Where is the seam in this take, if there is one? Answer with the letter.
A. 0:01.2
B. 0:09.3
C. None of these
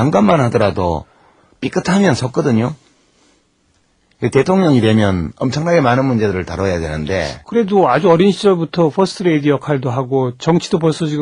A